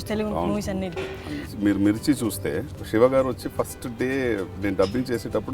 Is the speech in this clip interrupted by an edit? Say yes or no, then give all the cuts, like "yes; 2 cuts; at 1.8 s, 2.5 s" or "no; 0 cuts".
yes; 2 cuts; at 1.5 s, 2.7 s